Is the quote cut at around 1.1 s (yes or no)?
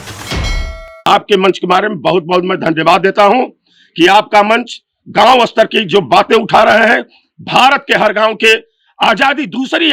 yes